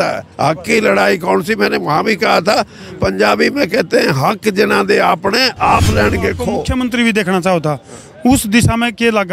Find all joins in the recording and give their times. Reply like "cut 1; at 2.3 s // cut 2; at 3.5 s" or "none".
cut 1; at 6.6 s